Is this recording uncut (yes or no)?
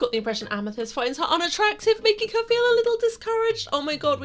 yes